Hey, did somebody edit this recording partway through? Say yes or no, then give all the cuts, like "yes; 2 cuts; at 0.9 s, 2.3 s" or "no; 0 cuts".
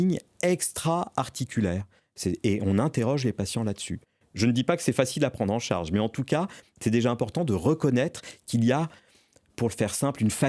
no; 0 cuts